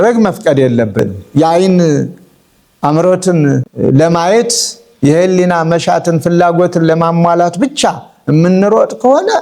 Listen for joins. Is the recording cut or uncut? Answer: cut